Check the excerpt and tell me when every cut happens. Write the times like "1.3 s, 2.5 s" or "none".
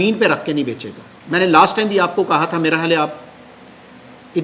none